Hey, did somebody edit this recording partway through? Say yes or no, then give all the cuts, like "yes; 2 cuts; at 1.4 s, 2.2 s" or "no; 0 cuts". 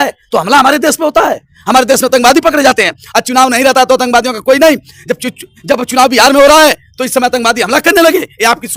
no; 0 cuts